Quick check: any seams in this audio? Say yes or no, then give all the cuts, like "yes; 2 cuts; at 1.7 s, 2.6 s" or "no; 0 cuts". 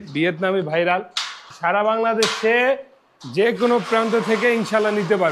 yes; 1 cut; at 1.4 s